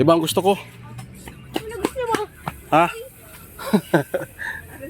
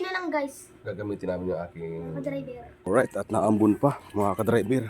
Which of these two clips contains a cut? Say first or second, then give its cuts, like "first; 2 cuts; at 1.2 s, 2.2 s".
second; 1 cut; at 2.9 s